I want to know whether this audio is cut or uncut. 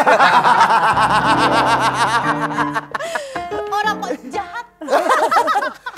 uncut